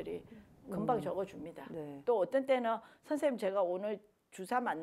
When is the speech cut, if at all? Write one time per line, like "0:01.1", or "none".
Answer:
0:02.0